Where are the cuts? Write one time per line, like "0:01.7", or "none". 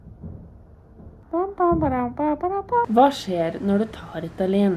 0:01.2
0:02.9